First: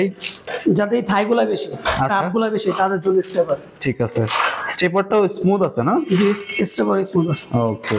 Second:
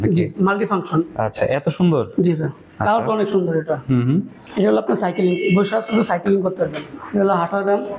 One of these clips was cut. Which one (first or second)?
second